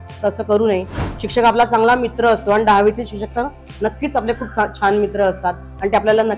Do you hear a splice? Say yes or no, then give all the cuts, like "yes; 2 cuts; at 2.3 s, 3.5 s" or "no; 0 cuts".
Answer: no; 0 cuts